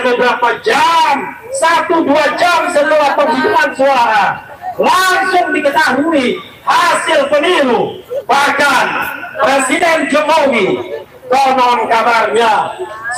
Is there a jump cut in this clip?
yes; 1 cut; at 8.1 s

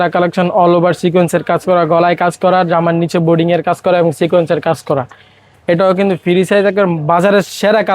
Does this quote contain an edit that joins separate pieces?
no; 0 cuts

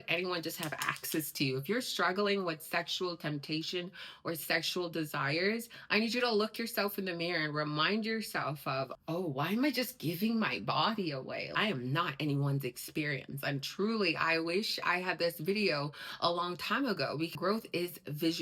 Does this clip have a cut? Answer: yes; 2 cuts; at 11.5 s, 17.3 s

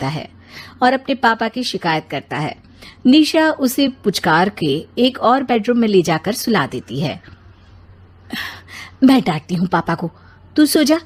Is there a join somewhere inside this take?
no; 0 cuts

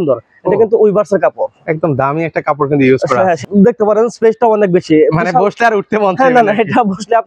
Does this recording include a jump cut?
yes; 1 cut; at 3.4 s

